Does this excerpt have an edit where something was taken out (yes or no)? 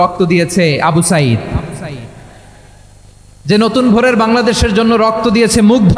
no